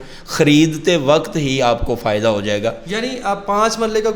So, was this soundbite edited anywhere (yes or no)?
no